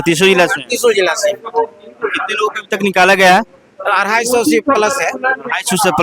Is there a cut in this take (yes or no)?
no